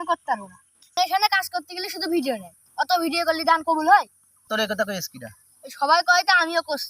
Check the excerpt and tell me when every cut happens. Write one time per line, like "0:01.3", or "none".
0:00.9
0:04.4